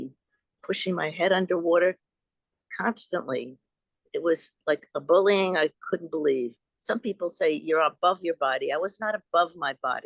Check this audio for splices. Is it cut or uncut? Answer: cut